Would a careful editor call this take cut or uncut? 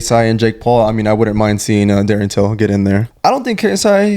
cut